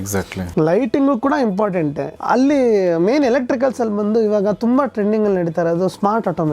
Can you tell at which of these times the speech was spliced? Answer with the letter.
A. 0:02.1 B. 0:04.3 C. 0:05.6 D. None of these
A